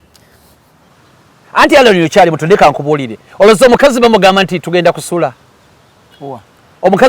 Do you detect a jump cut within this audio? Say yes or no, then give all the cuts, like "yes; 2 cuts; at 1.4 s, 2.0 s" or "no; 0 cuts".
yes; 1 cut; at 0.9 s